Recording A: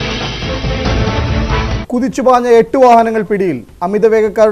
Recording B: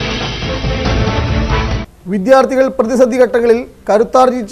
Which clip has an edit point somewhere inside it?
B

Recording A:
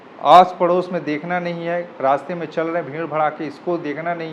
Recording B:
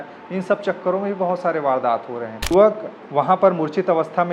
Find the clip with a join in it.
B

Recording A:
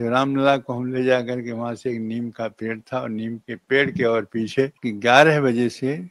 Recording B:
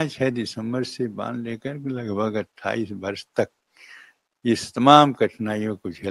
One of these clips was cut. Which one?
A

